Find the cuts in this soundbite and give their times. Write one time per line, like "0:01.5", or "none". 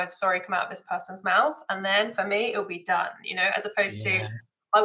none